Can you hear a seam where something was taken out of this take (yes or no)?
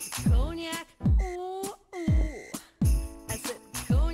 no